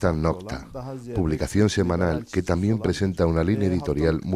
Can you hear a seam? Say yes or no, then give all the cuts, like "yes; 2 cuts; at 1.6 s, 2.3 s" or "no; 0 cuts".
no; 0 cuts